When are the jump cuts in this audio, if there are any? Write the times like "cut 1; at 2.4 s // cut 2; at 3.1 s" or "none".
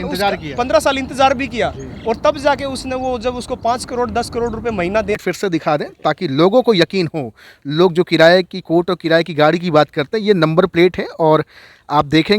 cut 1; at 5.2 s